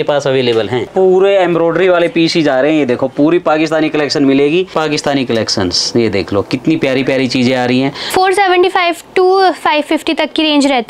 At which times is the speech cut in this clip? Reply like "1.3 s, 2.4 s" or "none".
0.9 s, 4.7 s, 8.0 s